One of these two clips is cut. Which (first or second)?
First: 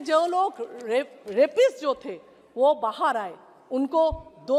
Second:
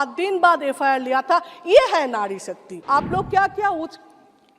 second